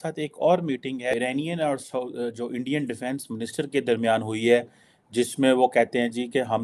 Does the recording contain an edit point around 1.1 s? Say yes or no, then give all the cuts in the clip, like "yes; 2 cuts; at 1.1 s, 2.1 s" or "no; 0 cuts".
yes; 1 cut; at 1.1 s